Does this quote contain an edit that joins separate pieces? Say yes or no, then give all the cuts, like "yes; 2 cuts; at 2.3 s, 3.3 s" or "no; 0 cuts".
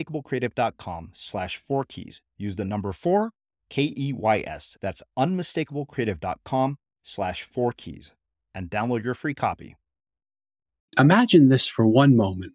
yes; 1 cut; at 10.9 s